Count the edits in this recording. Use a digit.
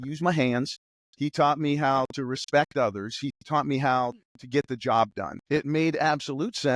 1